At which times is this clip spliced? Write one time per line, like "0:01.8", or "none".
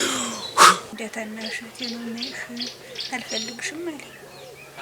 0:00.9